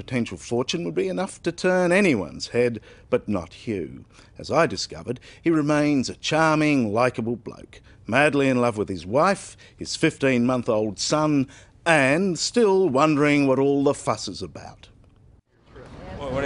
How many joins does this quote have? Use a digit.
1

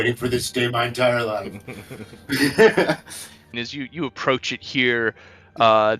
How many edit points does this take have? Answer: 1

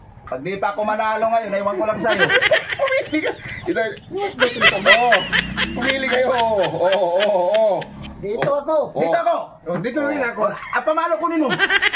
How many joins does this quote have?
0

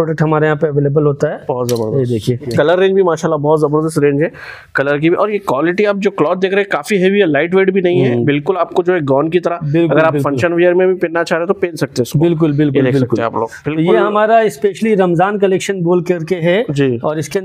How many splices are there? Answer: 1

